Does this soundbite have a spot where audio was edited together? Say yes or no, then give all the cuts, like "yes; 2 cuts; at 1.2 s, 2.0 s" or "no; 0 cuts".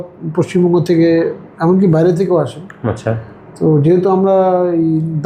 no; 0 cuts